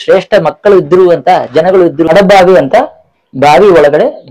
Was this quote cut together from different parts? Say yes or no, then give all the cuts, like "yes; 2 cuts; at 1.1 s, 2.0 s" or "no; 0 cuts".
yes; 1 cut; at 2.1 s